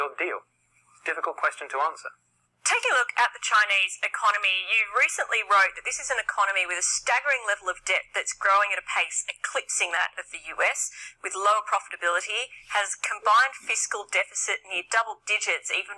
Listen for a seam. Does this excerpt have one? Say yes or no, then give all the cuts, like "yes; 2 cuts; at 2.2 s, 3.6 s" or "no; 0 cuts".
no; 0 cuts